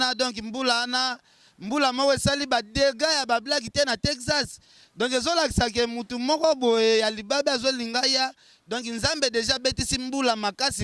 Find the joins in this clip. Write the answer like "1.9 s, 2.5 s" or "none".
none